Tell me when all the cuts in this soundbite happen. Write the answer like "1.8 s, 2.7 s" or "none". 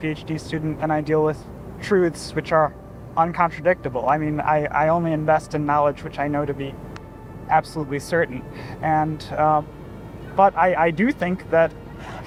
none

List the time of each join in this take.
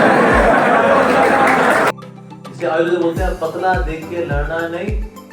1.9 s

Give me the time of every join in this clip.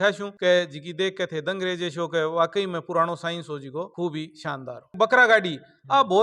4.9 s

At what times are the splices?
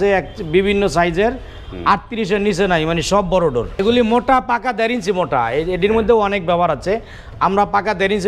3.8 s

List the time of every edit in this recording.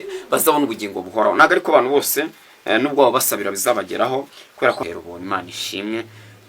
4.8 s

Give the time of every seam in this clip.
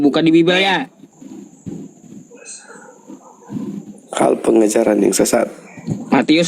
1.0 s

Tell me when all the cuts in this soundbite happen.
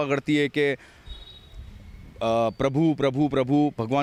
none

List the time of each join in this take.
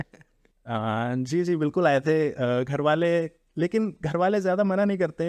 none

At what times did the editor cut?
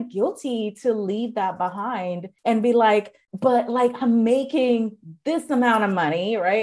2.3 s, 3.2 s

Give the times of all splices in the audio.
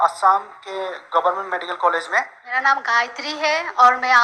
2.6 s

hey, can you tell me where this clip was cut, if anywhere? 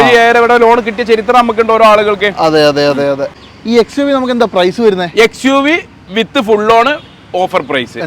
3.4 s

